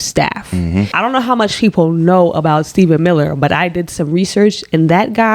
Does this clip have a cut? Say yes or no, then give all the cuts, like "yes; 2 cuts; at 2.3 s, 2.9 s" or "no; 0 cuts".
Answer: no; 0 cuts